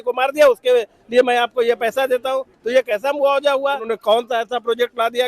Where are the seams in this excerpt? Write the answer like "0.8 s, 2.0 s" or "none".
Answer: 3.8 s

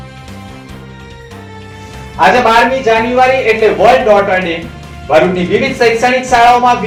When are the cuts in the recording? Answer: none

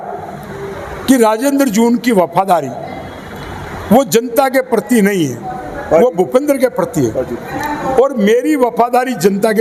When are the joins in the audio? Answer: none

